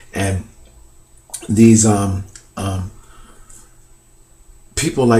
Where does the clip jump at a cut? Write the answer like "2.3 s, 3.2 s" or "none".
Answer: none